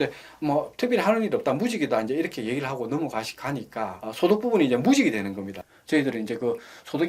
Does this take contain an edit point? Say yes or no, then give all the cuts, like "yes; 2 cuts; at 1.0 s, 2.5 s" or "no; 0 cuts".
yes; 1 cut; at 5.5 s